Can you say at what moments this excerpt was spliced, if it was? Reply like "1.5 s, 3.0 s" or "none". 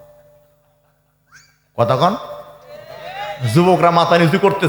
none